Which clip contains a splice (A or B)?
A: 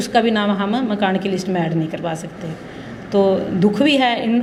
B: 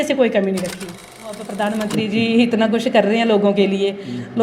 B